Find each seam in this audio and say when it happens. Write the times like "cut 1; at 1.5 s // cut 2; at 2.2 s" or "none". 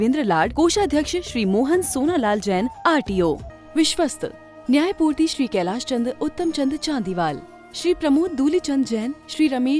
cut 1; at 3.5 s